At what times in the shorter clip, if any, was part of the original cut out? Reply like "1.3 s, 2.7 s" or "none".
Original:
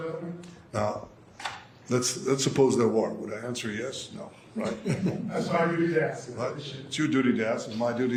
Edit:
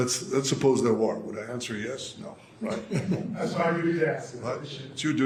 none